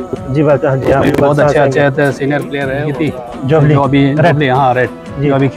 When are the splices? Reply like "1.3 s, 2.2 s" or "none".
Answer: 2.8 s